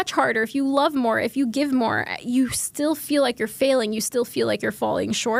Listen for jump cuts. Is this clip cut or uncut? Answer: uncut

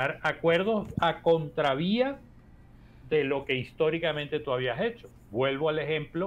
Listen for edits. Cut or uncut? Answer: uncut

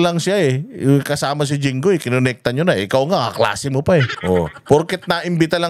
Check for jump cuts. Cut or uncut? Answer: cut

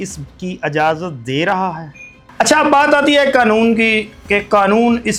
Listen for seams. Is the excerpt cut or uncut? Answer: uncut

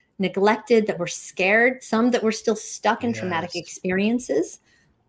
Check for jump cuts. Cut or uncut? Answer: uncut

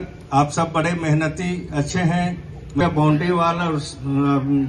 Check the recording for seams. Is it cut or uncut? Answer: cut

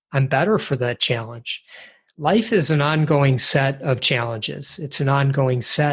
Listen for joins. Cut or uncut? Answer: uncut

